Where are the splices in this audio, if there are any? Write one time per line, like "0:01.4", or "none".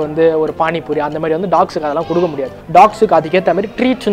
0:02.5